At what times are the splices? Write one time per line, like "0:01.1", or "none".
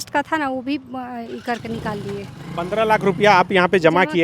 none

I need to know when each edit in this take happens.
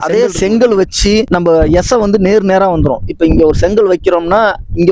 0:01.3

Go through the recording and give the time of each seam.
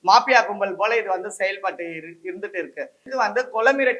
0:03.1

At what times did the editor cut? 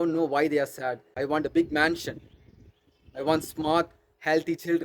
0:01.2

